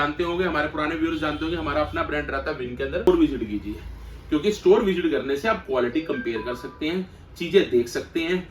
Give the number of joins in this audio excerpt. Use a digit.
1